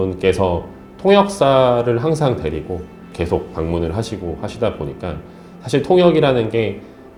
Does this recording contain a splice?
no; 0 cuts

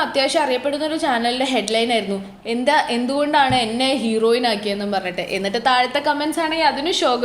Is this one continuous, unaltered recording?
yes; 0 cuts

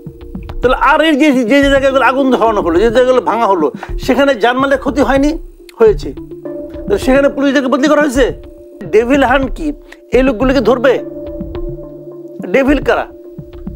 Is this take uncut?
no; 1 cut; at 8.9 s

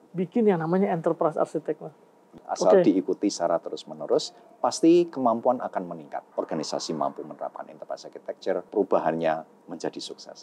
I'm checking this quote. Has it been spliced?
yes; 3 cuts; at 2.4 s, 6.3 s, 8.7 s

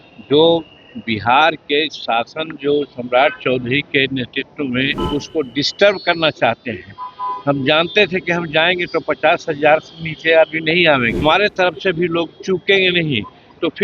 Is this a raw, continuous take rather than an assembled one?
no; 2 cuts; at 5.0 s, 11.2 s

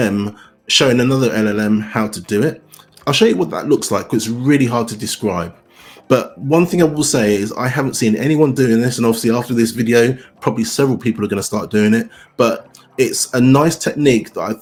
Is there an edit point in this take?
no; 0 cuts

